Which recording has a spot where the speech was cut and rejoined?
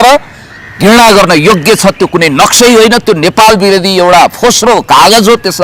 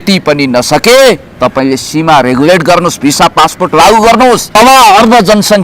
second; 1 cut; at 4.5 s

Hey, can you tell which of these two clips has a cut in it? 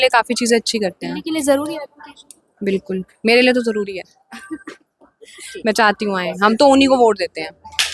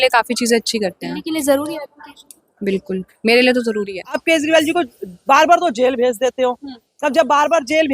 second; 1 cut; at 4.2 s

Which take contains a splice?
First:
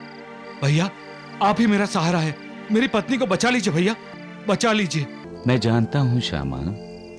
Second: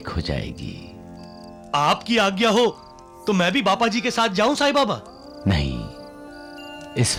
first; 1 cut; at 5.2 s

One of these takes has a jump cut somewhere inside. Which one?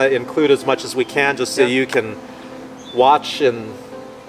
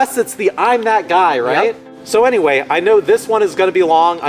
second; 1 cut; at 1.9 s

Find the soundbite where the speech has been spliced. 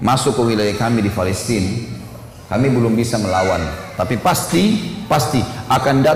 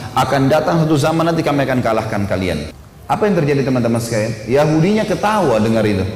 second; 1 cut; at 2.7 s

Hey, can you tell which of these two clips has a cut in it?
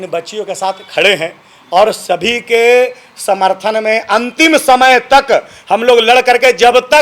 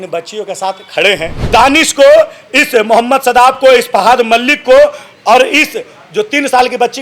second; 1 cut; at 1.3 s

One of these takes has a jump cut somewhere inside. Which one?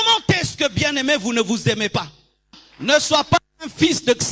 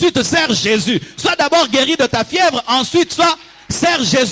first; 1 cut; at 2.6 s

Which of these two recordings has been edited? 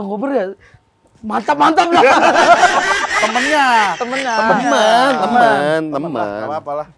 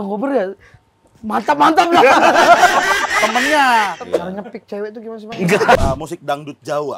second; 2 cuts; at 4.0 s, 5.8 s

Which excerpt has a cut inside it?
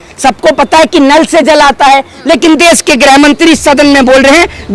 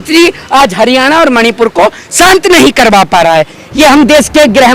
second; 1 cut; at 3.6 s

